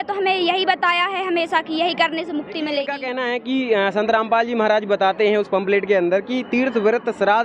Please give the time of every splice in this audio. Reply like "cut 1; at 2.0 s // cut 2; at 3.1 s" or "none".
cut 1; at 3.0 s